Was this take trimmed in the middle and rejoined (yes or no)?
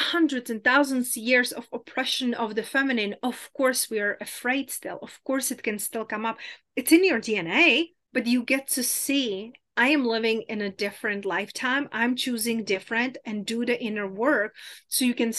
yes